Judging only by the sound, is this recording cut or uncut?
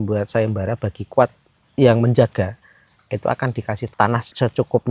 cut